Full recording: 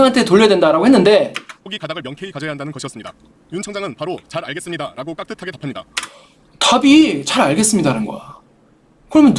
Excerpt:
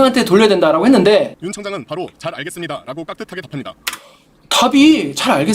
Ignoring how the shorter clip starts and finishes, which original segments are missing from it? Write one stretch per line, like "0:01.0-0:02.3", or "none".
0:01.4-0:03.5